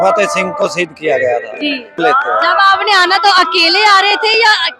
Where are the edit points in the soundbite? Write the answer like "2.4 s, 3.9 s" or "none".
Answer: 1.9 s